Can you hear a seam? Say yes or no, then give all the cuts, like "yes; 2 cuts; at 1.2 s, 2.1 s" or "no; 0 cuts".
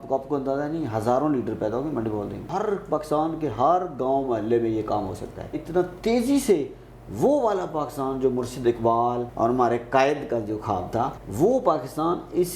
yes; 4 cuts; at 2.4 s, 5.6 s, 9.3 s, 11.2 s